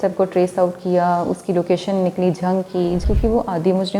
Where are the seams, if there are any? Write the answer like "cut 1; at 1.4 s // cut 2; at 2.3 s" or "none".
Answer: cut 1; at 3.0 s